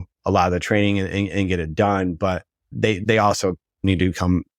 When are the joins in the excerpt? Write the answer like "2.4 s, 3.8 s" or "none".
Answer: 3.0 s